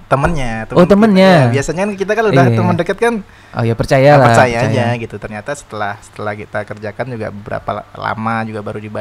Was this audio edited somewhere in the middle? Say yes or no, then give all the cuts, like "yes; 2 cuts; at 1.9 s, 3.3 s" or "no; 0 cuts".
no; 0 cuts